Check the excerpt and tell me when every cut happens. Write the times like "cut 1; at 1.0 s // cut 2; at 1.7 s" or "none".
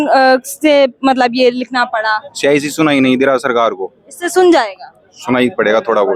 none

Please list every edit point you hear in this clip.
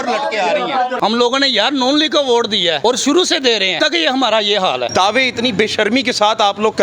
cut 1; at 1.0 s // cut 2; at 2.8 s // cut 3; at 3.7 s // cut 4; at 4.9 s

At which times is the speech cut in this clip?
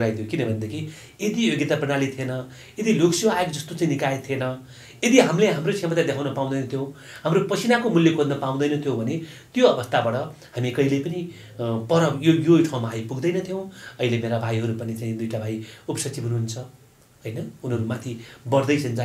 none

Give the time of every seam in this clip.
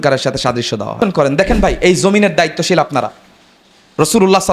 cut 1; at 1.0 s

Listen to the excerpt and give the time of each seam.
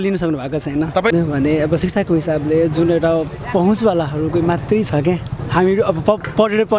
cut 1; at 1.1 s

